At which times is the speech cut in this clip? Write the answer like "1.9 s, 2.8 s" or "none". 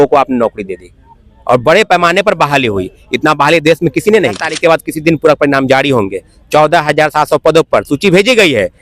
4.5 s